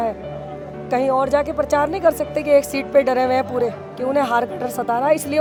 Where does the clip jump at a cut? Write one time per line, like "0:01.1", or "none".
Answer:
none